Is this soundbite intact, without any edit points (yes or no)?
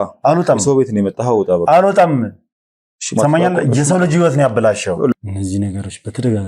no